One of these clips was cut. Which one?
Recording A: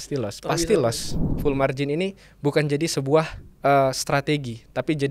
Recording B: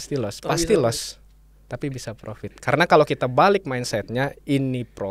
A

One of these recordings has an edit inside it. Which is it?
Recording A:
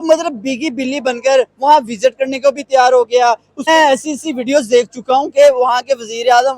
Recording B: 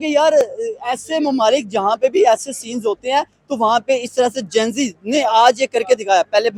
A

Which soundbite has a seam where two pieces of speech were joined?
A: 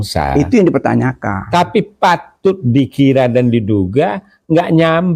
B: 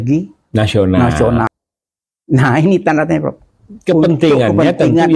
B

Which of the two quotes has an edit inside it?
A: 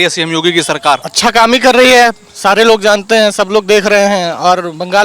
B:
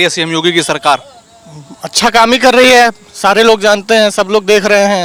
A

